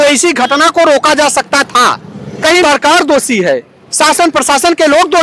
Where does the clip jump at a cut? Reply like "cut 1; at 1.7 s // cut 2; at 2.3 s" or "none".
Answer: cut 1; at 2.6 s